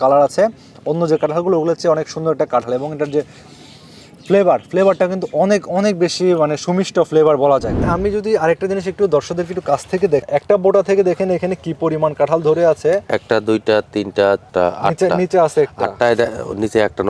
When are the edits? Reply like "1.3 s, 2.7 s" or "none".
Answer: 7.8 s, 10.2 s, 14.5 s